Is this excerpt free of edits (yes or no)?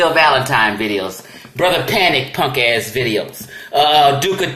yes